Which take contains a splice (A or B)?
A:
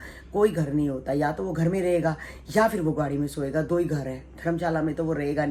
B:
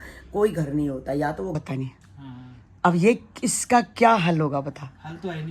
B